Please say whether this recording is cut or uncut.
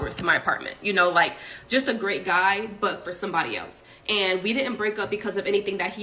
cut